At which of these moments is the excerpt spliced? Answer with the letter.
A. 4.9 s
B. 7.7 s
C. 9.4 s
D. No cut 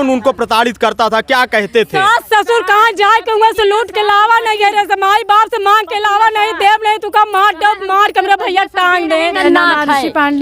C